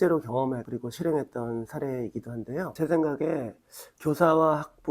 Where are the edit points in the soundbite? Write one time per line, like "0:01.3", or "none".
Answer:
0:02.7